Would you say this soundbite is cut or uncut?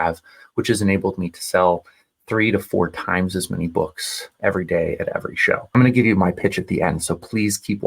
cut